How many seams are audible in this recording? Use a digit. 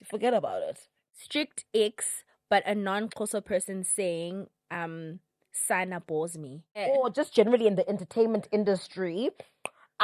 2